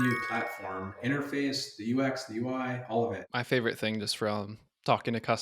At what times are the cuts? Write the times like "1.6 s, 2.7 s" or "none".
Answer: 1.0 s, 3.2 s